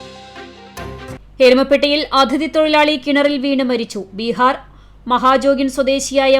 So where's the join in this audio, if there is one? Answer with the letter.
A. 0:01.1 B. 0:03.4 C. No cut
A